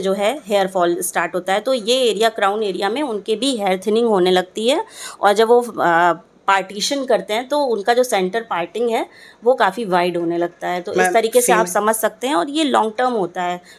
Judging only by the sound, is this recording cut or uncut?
uncut